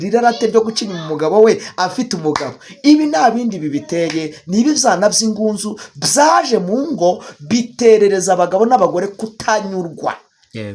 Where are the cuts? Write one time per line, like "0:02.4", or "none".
none